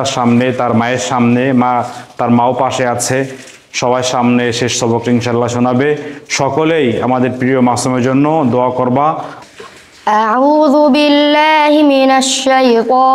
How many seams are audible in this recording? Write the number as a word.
one